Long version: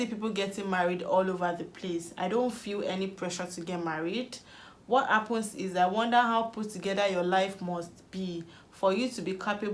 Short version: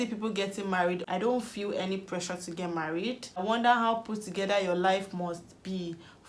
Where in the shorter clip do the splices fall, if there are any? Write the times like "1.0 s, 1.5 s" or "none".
1.0 s, 3.4 s